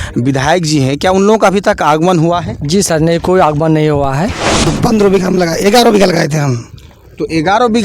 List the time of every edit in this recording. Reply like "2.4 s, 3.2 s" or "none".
4.7 s